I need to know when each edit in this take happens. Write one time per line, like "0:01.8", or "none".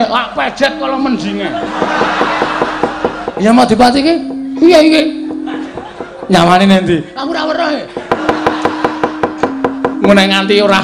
0:03.3